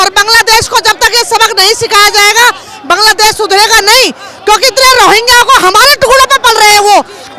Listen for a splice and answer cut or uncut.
uncut